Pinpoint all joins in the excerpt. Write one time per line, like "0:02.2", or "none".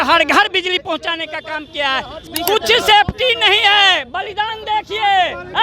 0:02.2